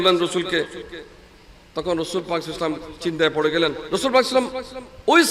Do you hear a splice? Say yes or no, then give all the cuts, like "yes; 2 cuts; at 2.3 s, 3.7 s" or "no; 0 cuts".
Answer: yes; 1 cut; at 3.8 s